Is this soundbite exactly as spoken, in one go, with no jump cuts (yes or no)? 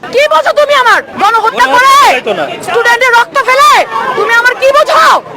no